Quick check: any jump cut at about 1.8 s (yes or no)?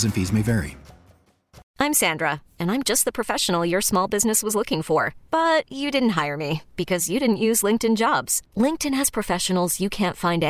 yes